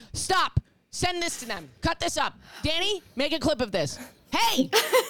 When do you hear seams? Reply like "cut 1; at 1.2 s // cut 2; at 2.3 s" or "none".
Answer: none